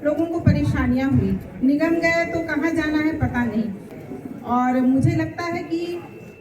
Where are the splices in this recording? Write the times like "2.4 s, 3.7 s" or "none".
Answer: 3.9 s

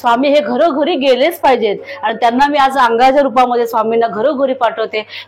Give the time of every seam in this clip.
none

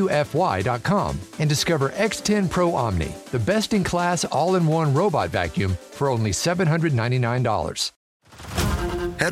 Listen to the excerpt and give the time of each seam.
7.8 s

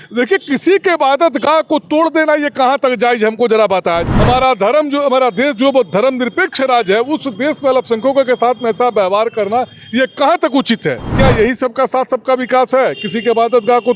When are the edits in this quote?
4.1 s, 11.1 s

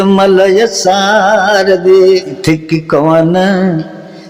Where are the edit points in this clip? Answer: 2.4 s

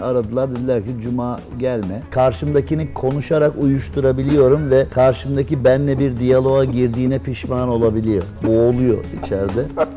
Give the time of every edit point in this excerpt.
2.1 s, 4.9 s, 8.4 s

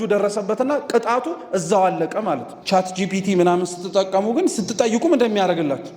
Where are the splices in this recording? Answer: 2.5 s

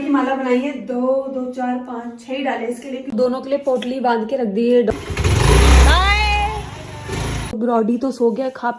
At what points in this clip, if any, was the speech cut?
3.1 s, 4.9 s, 7.6 s

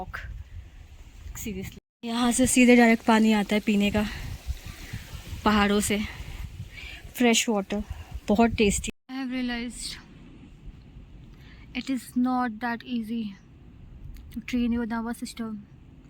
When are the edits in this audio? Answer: 1.8 s, 8.8 s

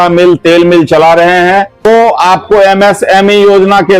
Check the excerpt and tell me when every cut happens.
1.8 s

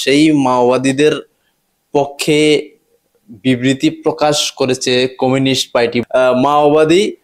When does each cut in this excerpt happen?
6.0 s

